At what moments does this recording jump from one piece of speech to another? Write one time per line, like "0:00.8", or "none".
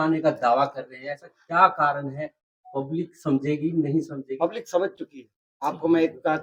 none

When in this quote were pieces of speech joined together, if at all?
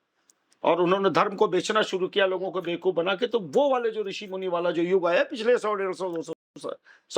none

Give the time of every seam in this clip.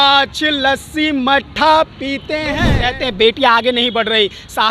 0:02.7

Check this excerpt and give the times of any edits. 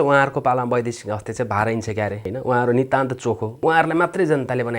0:02.2
0:03.5

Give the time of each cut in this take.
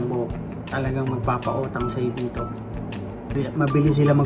0:03.3

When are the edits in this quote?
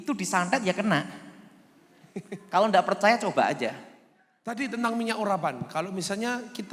0:04.6

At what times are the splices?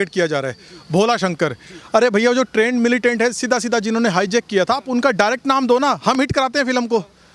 none

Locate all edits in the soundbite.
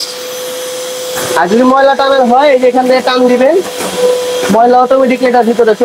none

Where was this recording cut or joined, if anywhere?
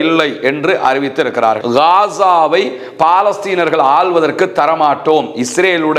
0:01.6

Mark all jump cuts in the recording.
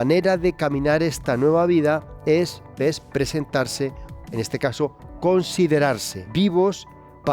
0:06.2

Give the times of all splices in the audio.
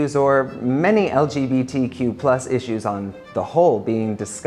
none

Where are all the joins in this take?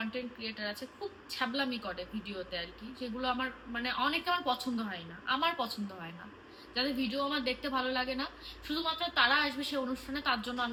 none

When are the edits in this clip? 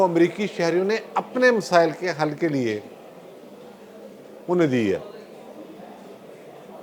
none

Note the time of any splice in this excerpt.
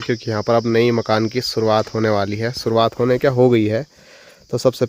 none

